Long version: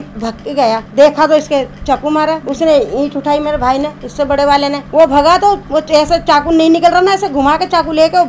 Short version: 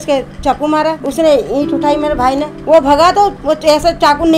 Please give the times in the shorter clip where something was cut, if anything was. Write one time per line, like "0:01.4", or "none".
0:02.6